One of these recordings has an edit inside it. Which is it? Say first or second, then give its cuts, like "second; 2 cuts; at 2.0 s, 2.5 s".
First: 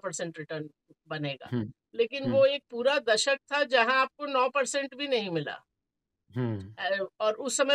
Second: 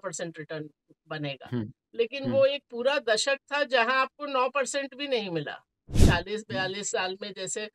second; 1 cut; at 6.0 s